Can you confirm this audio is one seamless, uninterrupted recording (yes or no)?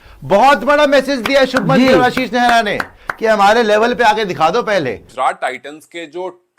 no